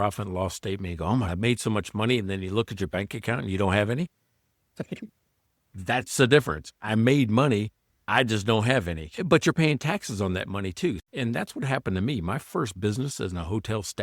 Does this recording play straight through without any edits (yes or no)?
no